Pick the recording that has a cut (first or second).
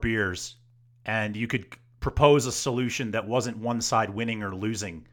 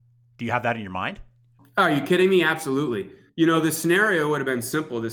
second